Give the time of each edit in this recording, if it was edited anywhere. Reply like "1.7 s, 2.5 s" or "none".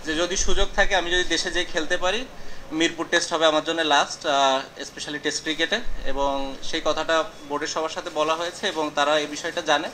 none